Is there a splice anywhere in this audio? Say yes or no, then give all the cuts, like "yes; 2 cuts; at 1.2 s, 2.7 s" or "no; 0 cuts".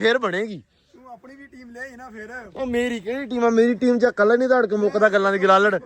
no; 0 cuts